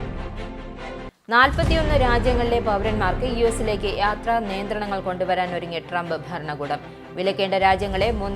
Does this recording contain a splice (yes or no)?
yes